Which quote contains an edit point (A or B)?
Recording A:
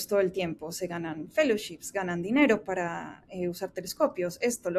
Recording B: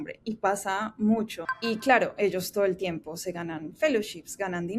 B